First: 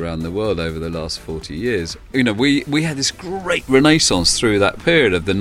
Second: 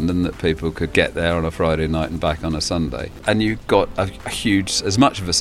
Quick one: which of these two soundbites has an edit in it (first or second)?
second